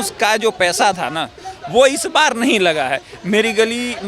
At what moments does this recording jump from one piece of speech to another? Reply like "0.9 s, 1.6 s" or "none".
none